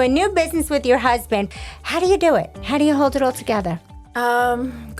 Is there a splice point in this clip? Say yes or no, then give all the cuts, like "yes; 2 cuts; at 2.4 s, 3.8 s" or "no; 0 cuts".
yes; 1 cut; at 1.5 s